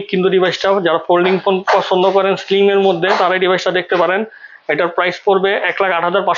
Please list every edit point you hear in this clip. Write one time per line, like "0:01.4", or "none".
none